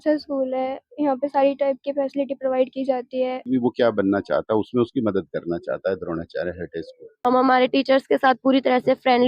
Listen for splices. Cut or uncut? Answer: cut